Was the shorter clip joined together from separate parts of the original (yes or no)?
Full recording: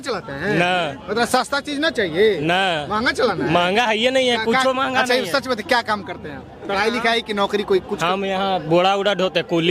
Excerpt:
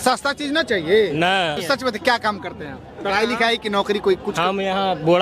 yes